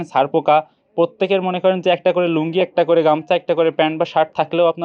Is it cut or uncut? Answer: uncut